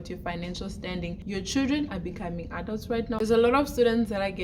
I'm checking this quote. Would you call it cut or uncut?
cut